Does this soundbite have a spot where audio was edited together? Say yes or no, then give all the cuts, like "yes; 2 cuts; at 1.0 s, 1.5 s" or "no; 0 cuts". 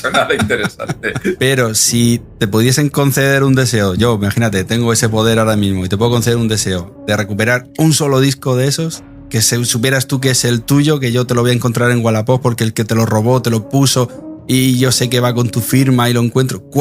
yes; 2 cuts; at 1.4 s, 2.3 s